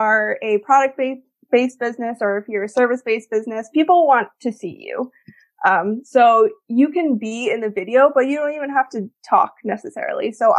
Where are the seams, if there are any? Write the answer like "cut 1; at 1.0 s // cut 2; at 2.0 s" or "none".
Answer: none